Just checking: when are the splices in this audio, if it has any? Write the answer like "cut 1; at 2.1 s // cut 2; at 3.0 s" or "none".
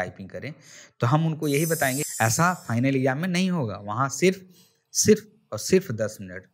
cut 1; at 2.0 s